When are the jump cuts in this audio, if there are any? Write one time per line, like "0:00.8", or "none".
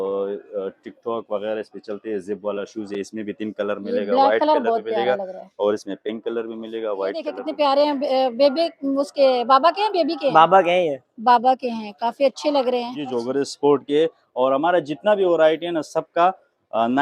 0:07.4
0:13.1